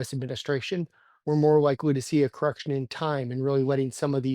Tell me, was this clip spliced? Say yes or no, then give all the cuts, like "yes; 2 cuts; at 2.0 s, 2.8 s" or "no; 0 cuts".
yes; 1 cut; at 1.0 s